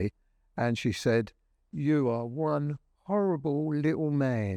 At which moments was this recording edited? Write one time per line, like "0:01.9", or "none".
none